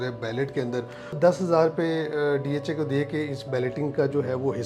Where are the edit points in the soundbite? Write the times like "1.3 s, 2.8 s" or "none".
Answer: 1.2 s